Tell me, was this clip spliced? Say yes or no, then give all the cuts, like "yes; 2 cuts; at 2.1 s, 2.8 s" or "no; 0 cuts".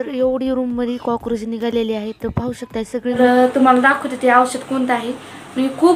yes; 1 cut; at 3.2 s